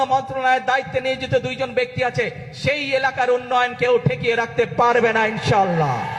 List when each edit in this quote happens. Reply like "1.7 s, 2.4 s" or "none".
none